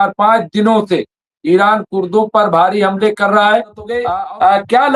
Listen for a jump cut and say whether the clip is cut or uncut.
cut